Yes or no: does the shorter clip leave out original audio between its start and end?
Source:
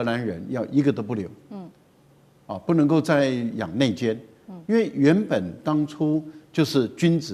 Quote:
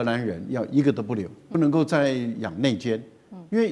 yes